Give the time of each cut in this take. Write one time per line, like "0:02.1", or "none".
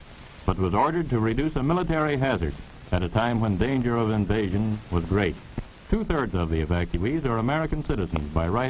0:05.4